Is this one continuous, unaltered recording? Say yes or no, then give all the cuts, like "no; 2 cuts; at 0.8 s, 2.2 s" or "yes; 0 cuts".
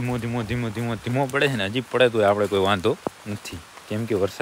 yes; 0 cuts